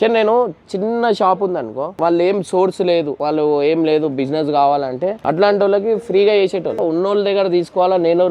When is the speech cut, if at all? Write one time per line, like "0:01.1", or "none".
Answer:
0:01.9
0:03.2
0:05.2
0:06.8